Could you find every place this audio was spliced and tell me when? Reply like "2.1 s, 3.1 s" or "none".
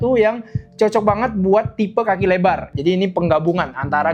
2.7 s